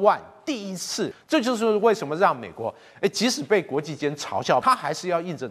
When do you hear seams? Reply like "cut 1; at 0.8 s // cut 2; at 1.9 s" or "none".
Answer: cut 1; at 1.2 s // cut 2; at 4.6 s